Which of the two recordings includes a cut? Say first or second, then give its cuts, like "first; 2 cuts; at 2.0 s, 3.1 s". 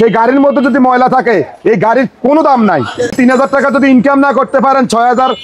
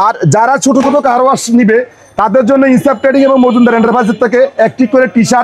first; 1 cut; at 3.0 s